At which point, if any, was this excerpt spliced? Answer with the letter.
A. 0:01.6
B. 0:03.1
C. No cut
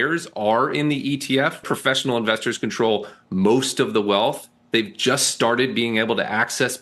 A